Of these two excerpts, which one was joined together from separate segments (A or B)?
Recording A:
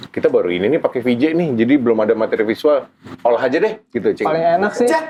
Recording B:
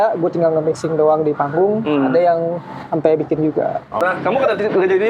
B